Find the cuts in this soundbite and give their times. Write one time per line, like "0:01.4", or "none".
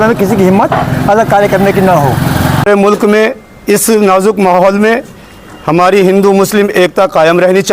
0:02.7